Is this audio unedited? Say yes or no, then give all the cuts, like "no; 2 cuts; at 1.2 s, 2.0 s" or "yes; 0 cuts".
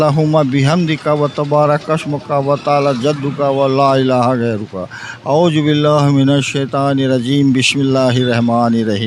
yes; 0 cuts